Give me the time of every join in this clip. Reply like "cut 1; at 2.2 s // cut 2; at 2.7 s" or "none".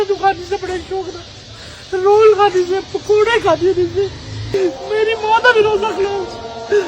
cut 1; at 4.5 s